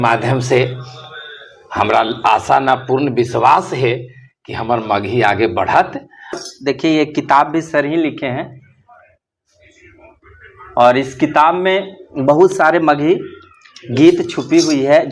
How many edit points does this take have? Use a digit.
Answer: 1